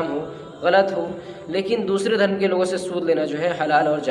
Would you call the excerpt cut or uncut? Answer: uncut